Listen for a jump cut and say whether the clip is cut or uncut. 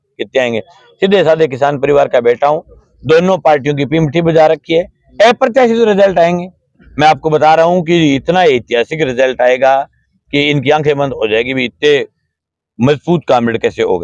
uncut